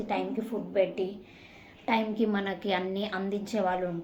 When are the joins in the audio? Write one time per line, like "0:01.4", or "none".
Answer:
none